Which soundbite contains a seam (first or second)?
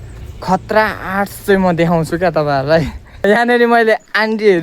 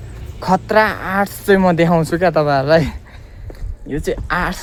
first